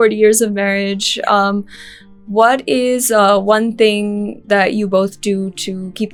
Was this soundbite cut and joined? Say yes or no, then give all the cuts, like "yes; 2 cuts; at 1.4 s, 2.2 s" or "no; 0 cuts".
no; 0 cuts